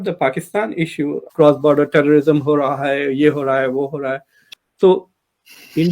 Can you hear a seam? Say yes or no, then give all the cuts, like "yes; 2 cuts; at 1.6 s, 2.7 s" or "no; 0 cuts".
yes; 2 cuts; at 1.3 s, 4.6 s